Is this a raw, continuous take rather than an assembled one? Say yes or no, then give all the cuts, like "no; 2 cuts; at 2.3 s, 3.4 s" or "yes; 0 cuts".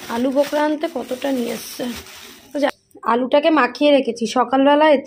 no; 1 cut; at 2.7 s